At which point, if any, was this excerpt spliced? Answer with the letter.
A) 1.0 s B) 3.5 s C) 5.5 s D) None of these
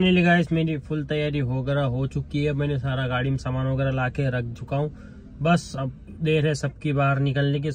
D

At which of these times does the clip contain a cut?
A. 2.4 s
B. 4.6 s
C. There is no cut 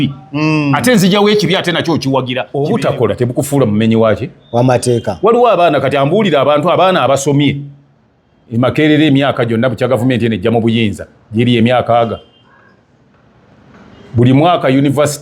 A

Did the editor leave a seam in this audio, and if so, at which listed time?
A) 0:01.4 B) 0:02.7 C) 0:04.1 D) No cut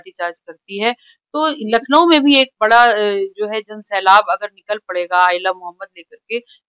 D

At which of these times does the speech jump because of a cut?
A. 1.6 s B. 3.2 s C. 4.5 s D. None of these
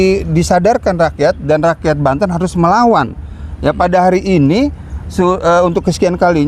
D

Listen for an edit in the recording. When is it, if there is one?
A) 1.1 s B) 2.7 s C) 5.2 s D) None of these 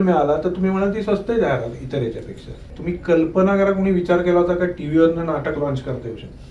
B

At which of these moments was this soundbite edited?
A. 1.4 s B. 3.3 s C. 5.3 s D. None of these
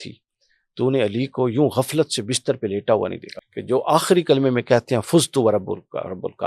B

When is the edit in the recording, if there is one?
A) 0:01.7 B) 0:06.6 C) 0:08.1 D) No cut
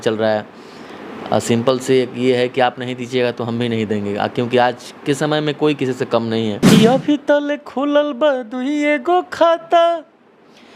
B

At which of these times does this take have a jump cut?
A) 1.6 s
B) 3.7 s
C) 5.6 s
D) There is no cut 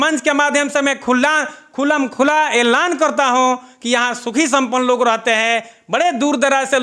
D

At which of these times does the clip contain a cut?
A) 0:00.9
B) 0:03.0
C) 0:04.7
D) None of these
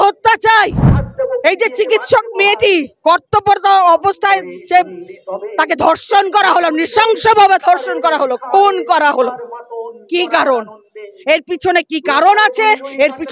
A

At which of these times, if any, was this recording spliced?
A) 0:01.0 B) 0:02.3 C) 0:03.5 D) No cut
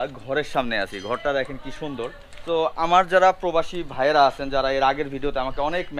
B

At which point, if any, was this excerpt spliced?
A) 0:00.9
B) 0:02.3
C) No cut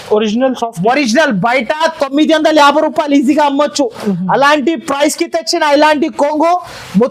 C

